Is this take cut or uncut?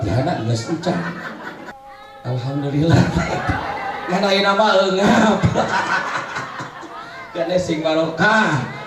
cut